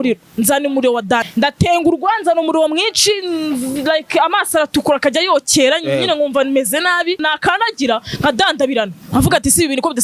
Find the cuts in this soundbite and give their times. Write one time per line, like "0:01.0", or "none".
0:01.3
0:07.2